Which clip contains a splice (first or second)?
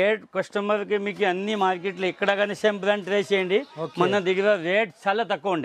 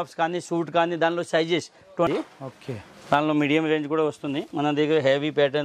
second